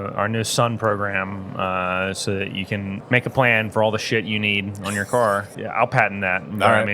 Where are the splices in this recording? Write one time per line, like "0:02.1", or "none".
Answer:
0:03.0
0:05.6